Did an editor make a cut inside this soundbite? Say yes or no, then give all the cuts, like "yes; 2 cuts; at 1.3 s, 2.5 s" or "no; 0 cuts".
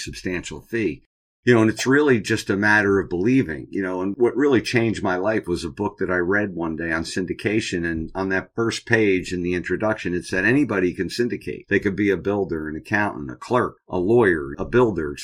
no; 0 cuts